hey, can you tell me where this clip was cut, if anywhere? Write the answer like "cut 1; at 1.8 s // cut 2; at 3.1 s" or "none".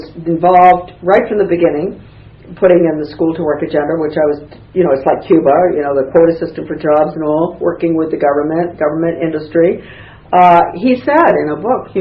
cut 1; at 10.4 s